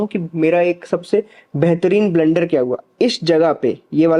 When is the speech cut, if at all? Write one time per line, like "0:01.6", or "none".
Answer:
none